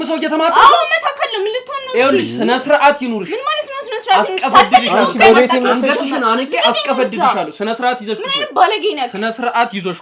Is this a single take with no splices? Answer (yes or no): yes